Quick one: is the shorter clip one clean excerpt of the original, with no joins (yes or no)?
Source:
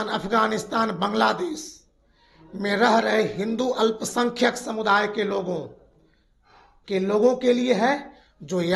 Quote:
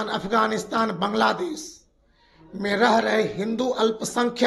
yes